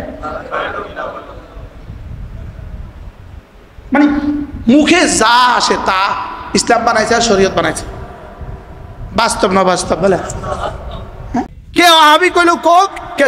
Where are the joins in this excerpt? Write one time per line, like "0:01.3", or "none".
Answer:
0:11.5